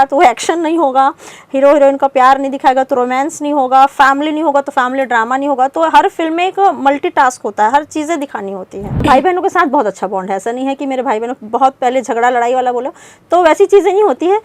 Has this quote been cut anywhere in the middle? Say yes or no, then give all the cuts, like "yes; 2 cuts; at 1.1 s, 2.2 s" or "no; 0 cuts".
yes; 1 cut; at 9.0 s